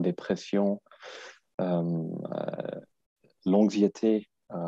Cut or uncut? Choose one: uncut